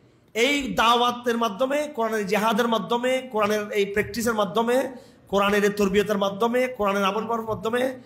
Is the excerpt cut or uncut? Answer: uncut